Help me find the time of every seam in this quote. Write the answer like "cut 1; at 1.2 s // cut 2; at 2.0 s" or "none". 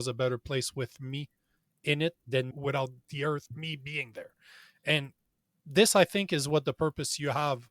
cut 1; at 2.5 s